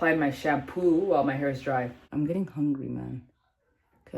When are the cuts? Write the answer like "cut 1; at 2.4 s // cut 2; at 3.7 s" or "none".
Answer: cut 1; at 1.8 s